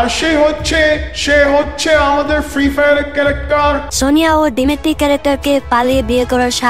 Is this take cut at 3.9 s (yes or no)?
yes